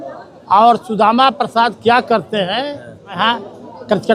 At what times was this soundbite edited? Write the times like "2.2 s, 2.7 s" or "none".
3.2 s